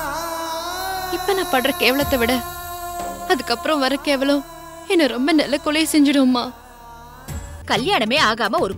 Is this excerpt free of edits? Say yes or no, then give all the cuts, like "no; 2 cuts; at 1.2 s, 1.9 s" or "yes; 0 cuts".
no; 1 cut; at 7.5 s